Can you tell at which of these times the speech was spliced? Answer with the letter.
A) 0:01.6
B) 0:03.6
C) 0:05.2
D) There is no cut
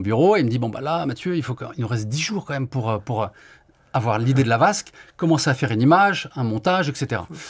D